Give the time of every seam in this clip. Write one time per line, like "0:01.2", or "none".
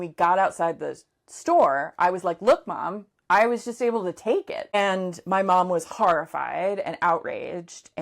0:04.7